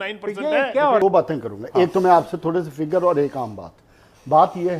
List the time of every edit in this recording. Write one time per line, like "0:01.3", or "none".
0:01.0